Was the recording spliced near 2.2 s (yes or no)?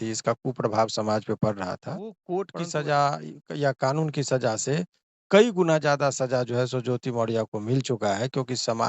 yes